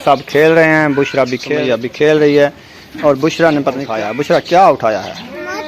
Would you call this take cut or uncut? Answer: cut